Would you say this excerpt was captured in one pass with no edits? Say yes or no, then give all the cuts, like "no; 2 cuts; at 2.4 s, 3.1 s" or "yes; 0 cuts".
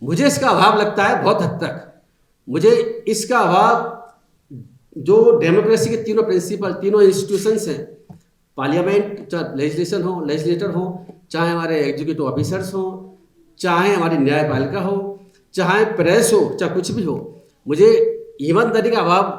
yes; 0 cuts